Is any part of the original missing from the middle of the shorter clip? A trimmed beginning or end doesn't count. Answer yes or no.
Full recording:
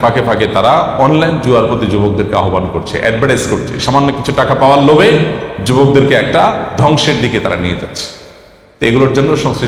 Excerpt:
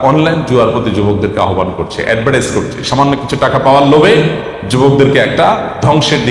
no